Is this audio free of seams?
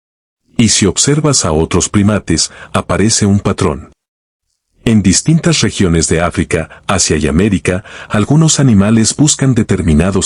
no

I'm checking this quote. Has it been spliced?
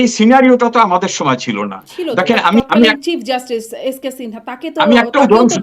yes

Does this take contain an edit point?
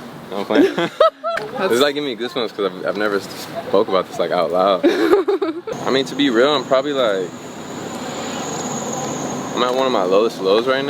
yes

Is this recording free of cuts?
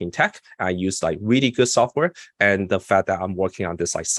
yes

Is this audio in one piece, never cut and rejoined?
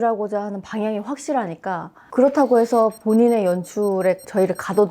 yes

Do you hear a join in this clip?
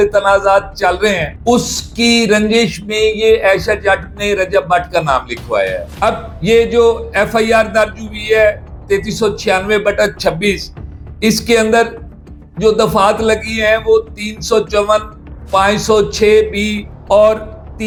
no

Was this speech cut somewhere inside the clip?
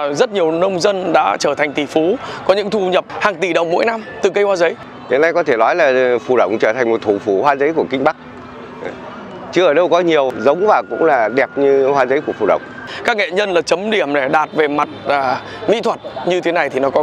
yes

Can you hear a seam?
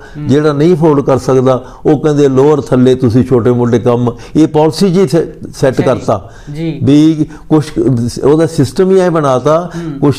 no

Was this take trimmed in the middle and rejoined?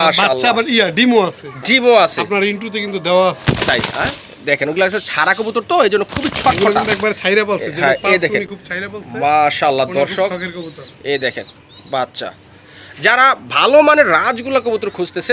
no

